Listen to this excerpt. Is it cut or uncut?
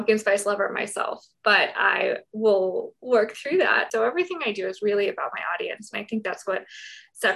cut